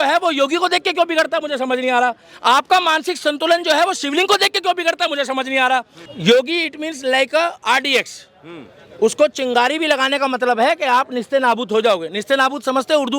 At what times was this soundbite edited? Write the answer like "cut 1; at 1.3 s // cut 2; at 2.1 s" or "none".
cut 1; at 6.0 s